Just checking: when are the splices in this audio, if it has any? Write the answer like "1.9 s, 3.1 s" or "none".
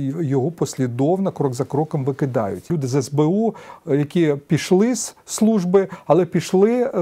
2.7 s